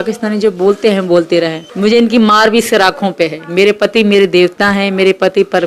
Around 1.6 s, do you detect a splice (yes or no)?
yes